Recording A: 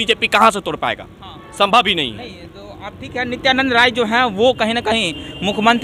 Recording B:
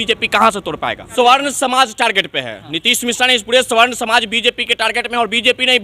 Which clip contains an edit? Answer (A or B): B